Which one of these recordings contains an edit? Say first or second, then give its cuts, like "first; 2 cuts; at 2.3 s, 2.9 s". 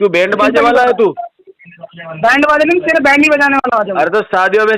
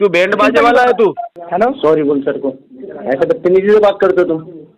second; 1 cut; at 1.4 s